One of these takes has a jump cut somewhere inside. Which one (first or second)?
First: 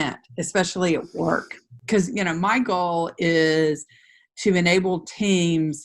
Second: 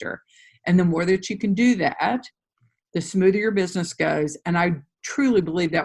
first